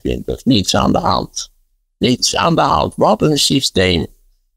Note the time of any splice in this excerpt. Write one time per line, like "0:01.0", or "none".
none